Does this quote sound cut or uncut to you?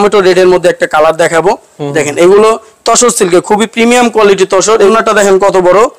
cut